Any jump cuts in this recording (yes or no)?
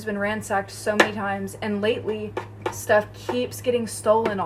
no